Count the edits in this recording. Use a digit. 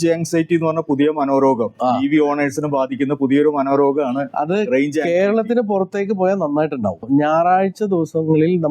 1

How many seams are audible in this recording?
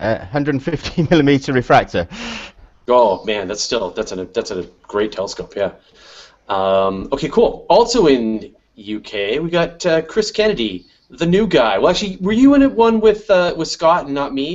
1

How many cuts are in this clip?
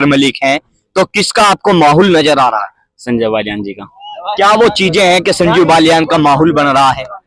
0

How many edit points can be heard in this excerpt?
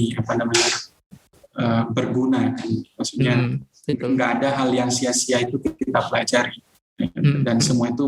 0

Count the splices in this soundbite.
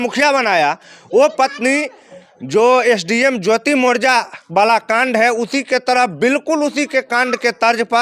0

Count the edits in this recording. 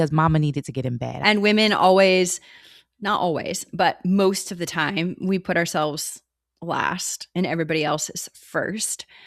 1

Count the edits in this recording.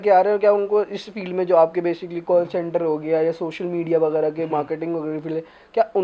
0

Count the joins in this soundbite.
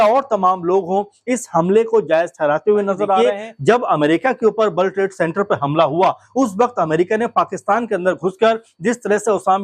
1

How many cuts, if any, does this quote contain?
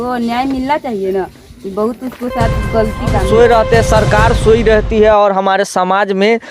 1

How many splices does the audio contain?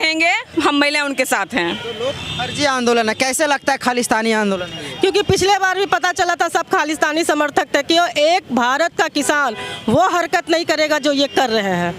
1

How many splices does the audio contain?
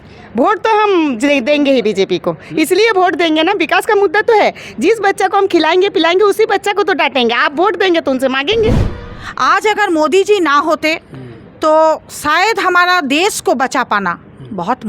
1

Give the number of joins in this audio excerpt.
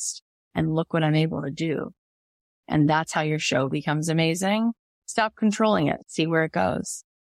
2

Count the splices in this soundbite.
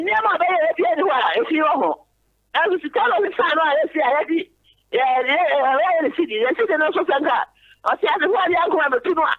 0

